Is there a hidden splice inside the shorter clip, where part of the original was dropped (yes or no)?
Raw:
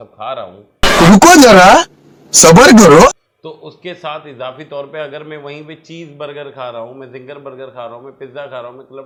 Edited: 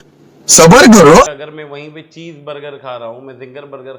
yes